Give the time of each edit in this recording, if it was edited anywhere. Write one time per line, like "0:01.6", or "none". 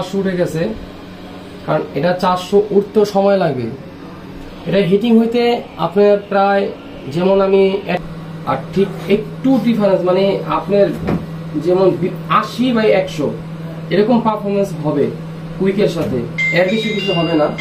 0:08.0